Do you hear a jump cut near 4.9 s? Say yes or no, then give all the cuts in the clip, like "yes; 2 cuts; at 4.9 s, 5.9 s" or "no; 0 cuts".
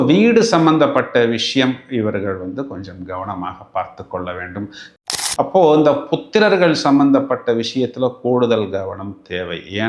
yes; 1 cut; at 4.9 s